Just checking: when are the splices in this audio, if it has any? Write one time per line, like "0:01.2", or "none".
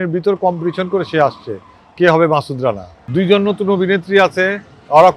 0:02.9